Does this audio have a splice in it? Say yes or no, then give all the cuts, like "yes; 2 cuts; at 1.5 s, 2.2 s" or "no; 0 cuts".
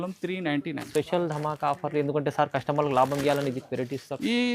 no; 0 cuts